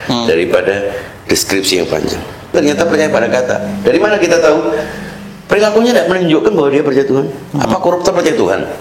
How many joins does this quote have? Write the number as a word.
one